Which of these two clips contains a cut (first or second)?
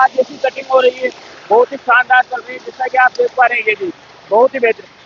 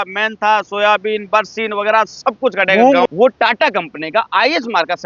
second